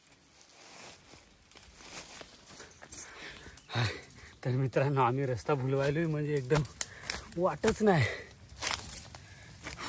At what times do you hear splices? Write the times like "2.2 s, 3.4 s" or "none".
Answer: 3.1 s